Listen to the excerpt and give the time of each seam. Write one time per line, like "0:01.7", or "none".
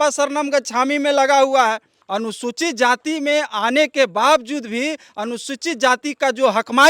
0:01.9